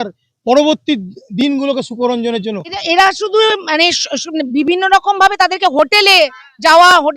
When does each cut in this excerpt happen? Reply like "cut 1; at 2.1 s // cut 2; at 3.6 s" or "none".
cut 1; at 2.8 s

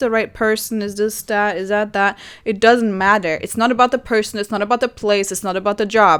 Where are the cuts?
none

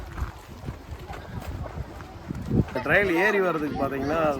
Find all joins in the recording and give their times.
cut 1; at 2.7 s

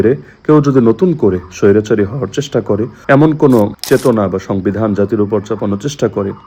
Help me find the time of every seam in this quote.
cut 1; at 2.9 s // cut 2; at 3.8 s

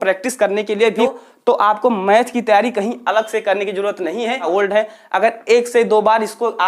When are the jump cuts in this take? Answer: cut 1; at 1.0 s // cut 2; at 4.5 s

